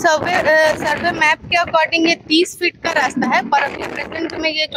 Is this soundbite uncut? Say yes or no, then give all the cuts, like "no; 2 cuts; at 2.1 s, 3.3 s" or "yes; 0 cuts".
yes; 0 cuts